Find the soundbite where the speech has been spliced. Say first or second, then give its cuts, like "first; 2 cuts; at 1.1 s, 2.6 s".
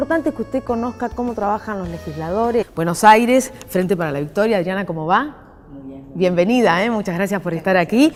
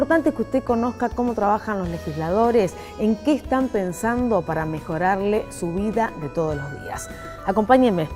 second; 1 cut; at 2.6 s